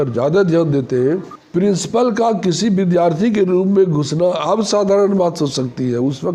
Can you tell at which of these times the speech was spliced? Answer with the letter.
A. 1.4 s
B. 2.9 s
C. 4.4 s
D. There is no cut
A